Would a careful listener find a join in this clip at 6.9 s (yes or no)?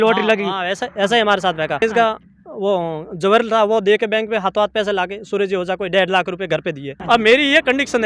yes